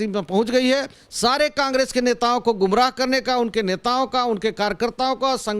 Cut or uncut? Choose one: cut